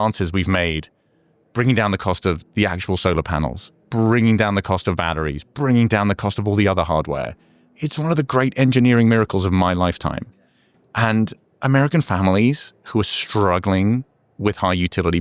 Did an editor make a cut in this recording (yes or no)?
no